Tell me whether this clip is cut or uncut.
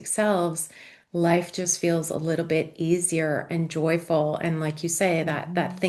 uncut